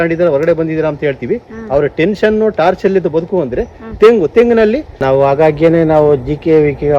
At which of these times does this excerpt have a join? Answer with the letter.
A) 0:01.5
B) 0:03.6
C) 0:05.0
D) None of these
C